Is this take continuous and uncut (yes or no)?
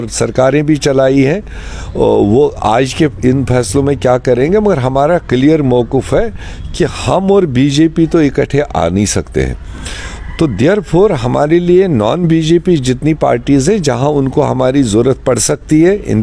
yes